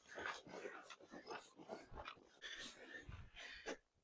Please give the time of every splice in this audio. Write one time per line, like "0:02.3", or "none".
0:02.4